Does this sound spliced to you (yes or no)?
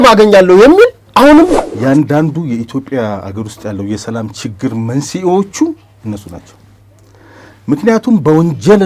yes